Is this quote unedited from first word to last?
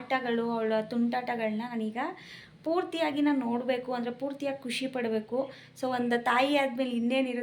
yes; 0 cuts

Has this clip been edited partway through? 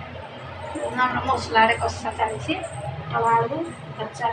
no; 0 cuts

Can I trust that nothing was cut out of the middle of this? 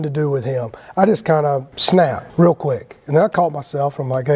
no; 1 cut; at 2.2 s

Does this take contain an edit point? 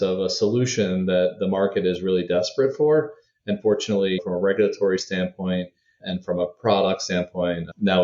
yes; 1 cut; at 4.2 s

